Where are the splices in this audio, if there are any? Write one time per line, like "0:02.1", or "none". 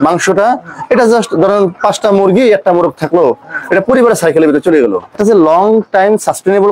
0:05.1